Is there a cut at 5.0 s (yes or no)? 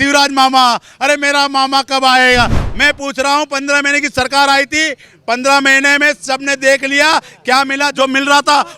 no